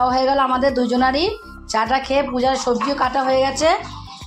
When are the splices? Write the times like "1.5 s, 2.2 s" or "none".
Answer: none